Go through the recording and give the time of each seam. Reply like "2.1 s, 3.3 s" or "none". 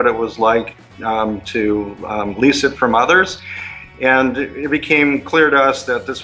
3.9 s